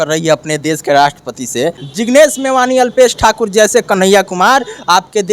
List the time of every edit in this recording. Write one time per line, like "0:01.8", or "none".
0:01.9